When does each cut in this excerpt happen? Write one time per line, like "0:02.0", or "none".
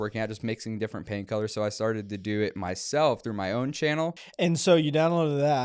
0:04.2